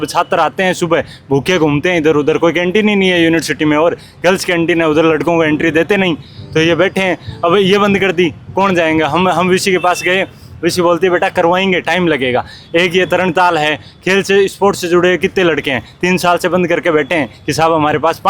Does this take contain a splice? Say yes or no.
no